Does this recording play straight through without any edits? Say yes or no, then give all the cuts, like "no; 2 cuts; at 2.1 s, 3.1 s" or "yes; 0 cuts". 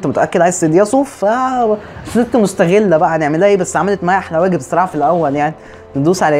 yes; 0 cuts